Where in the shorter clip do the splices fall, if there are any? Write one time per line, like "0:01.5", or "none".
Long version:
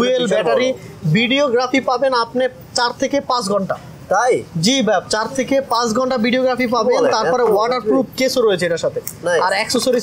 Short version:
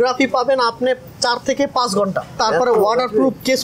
0:02.4

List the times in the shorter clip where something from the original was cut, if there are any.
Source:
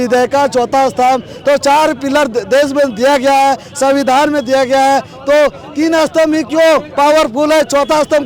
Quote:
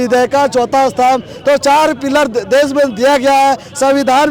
none

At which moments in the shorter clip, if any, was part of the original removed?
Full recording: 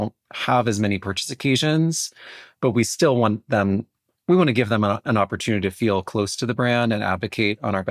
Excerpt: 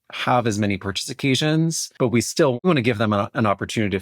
0:01.8
0:02.6

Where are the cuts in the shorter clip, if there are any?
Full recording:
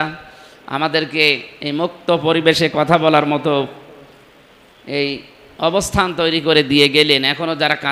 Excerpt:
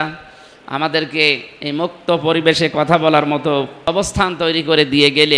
0:03.8

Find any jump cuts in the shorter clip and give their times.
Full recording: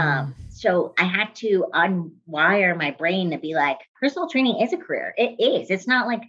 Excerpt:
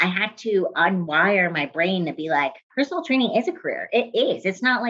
0:01.1

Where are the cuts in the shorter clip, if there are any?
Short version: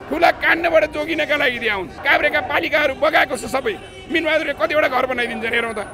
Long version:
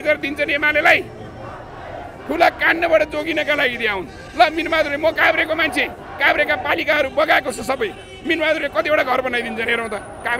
0:01.9

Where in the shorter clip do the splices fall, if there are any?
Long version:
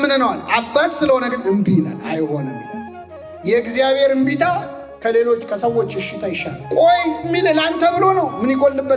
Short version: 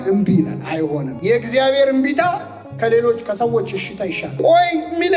0:01.1
0:04.2

